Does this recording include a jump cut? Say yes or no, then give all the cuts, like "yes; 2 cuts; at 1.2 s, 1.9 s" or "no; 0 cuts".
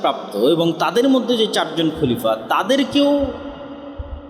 no; 0 cuts